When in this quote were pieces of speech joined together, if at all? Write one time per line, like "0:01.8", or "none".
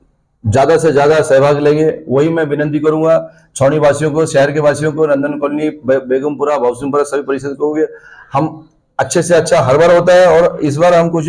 none